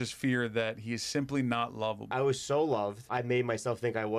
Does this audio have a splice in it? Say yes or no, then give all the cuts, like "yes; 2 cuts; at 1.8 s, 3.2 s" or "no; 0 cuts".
yes; 2 cuts; at 2.1 s, 3.0 s